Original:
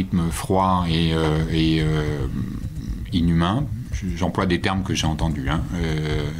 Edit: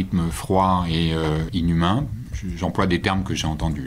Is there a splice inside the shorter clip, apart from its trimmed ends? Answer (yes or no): yes